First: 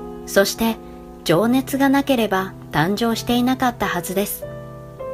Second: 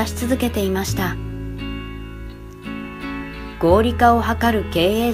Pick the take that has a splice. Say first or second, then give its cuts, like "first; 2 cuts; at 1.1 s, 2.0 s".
first; 1 cut; at 3.6 s